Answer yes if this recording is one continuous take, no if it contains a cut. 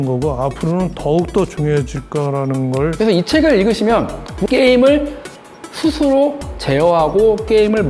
no